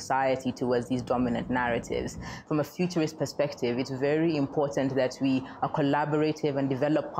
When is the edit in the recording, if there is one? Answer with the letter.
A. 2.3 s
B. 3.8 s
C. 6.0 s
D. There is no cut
A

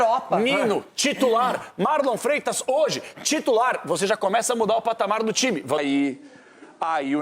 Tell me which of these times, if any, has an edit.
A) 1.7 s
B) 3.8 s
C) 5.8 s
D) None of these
C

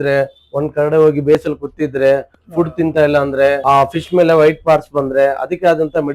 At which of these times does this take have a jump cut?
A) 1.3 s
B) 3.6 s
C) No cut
B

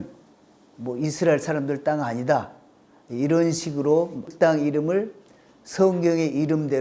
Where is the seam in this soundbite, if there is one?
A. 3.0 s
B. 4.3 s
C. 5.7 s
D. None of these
B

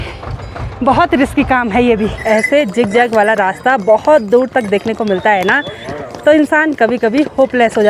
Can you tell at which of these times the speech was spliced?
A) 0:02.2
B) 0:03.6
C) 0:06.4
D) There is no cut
A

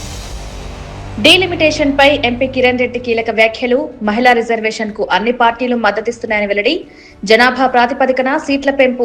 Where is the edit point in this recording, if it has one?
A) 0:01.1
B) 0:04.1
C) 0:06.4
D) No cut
A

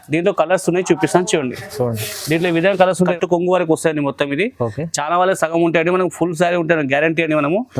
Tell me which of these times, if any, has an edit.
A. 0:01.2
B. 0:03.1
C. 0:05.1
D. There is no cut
B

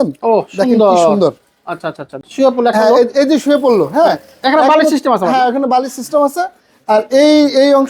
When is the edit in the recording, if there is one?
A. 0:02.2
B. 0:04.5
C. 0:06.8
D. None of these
A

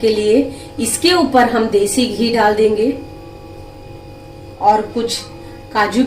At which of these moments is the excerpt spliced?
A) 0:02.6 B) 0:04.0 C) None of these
B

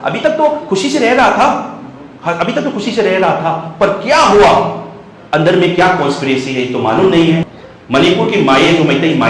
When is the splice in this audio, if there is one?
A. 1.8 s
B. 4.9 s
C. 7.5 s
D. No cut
C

